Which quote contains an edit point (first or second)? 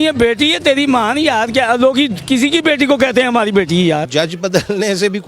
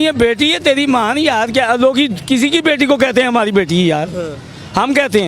first